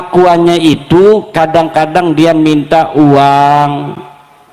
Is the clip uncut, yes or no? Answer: yes